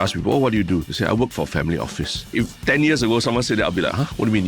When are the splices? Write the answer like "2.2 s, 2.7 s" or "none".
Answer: 0.9 s, 2.3 s